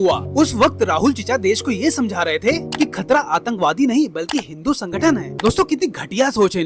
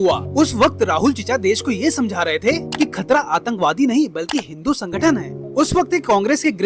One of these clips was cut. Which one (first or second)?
first